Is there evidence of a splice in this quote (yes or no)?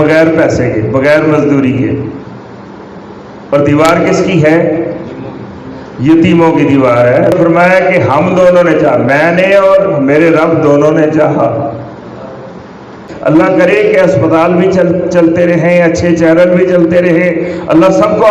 yes